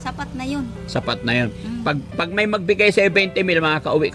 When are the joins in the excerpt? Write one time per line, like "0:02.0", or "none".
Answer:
none

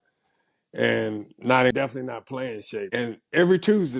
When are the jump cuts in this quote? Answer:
0:01.7
0:02.9

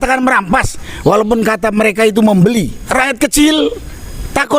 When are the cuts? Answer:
0:02.8

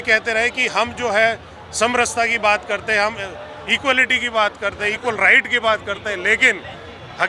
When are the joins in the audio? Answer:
none

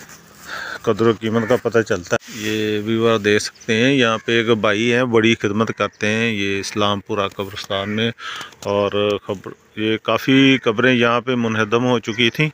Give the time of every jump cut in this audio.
0:02.3

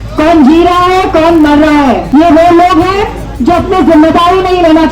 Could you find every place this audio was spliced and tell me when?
0:02.0

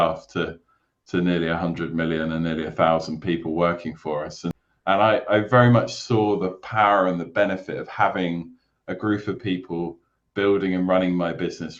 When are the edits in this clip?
0:04.7

